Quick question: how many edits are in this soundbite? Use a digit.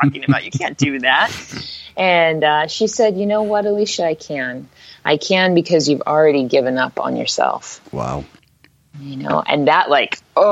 0